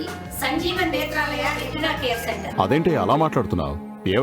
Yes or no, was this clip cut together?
yes